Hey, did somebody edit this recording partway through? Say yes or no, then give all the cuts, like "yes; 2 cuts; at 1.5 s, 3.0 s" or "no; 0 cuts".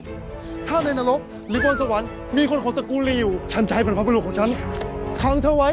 no; 0 cuts